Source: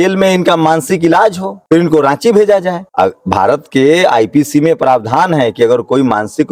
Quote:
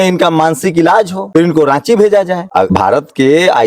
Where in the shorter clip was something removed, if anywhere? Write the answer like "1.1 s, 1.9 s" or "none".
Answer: 1.2 s, 2.6 s